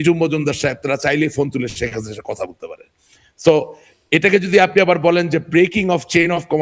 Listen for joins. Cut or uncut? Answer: uncut